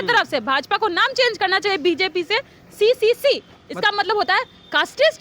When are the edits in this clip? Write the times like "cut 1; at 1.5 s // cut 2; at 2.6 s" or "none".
none